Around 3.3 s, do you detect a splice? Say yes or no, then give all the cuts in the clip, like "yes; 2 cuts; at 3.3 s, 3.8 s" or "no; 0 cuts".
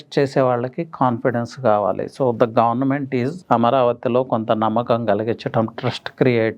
yes; 1 cut; at 3.3 s